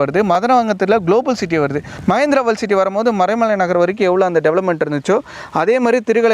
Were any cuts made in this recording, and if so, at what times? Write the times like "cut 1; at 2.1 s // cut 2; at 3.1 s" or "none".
cut 1; at 1.9 s